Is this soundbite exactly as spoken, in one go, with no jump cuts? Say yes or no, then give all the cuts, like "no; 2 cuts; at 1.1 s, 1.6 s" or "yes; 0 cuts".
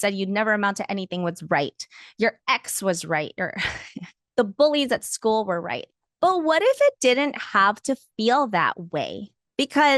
yes; 0 cuts